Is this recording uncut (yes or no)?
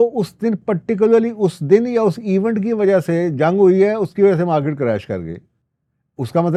yes